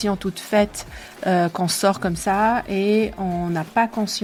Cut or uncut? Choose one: uncut